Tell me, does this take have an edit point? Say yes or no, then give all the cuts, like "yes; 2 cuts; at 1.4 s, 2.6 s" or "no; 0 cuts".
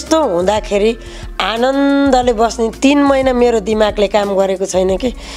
yes; 1 cut; at 2.7 s